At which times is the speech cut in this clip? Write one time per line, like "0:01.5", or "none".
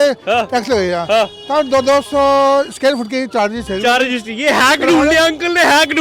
none